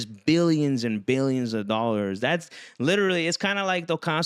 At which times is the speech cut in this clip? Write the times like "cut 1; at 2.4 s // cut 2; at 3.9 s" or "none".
none